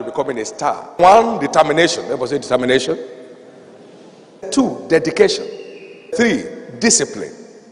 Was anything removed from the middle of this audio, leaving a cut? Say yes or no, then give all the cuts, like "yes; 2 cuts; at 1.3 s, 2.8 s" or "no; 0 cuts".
yes; 3 cuts; at 1.0 s, 4.5 s, 6.1 s